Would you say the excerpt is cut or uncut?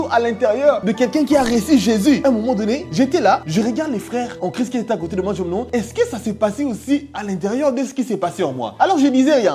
uncut